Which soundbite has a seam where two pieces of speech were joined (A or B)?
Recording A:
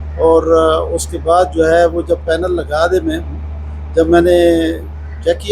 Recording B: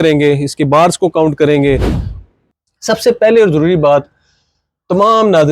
B